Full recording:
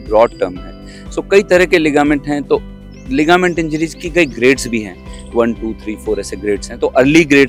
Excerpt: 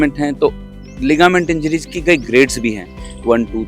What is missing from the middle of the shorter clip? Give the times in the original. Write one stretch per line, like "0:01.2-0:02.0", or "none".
none